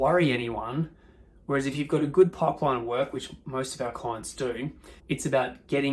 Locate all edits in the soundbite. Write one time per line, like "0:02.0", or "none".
0:04.9